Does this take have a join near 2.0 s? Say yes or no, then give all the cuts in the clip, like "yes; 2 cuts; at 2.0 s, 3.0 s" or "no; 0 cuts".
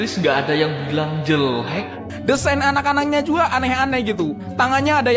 yes; 1 cut; at 2.0 s